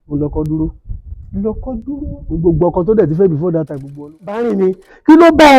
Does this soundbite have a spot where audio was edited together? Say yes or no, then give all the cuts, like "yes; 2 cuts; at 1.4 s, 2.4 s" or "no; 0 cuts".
yes; 1 cut; at 4.5 s